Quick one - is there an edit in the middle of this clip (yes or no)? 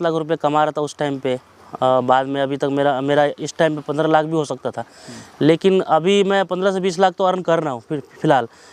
no